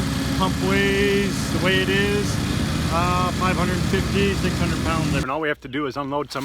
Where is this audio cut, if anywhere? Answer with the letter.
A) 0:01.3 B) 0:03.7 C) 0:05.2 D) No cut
C